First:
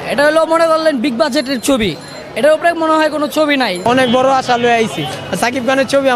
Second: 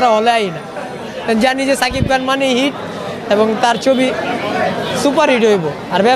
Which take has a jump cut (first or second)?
first